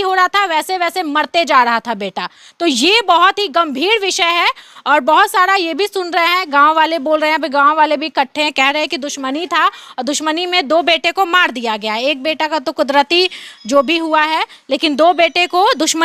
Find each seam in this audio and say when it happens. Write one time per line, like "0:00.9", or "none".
none